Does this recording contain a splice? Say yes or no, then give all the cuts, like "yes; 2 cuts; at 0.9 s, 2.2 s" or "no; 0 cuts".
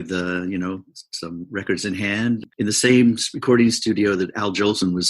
yes; 1 cut; at 2.4 s